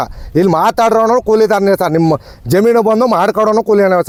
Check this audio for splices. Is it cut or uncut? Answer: uncut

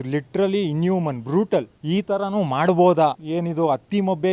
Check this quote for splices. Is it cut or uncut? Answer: cut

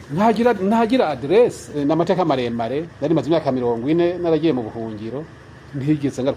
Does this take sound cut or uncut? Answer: cut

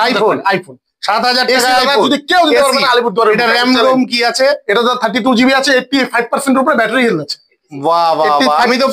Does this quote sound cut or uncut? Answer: uncut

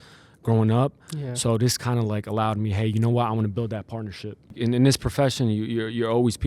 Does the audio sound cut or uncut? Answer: cut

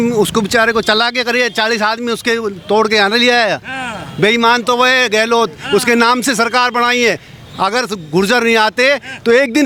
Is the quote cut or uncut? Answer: uncut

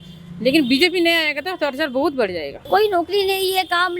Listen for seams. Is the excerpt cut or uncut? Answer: cut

